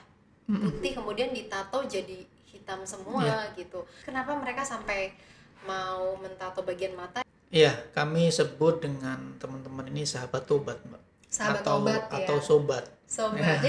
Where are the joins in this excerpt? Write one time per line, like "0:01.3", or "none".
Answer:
0:04.0
0:07.2